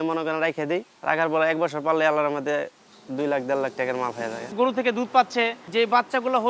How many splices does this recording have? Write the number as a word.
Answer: three